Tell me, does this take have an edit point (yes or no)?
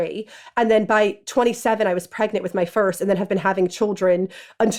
no